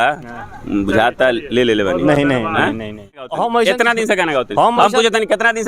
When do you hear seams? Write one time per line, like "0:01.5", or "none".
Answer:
0:03.2